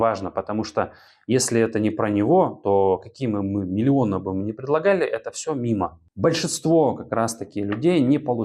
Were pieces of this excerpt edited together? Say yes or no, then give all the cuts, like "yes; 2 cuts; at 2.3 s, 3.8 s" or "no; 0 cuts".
yes; 1 cut; at 6.0 s